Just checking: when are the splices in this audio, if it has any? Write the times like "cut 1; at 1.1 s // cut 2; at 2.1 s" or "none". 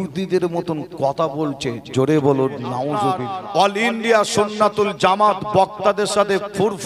cut 1; at 2.9 s